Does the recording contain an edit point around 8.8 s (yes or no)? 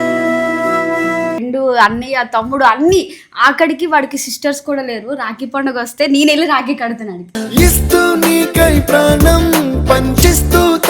no